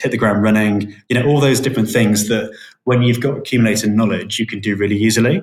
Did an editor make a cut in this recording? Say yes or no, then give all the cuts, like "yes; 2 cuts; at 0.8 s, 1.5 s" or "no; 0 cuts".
no; 0 cuts